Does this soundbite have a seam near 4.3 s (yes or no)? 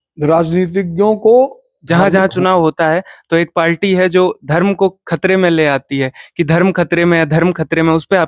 no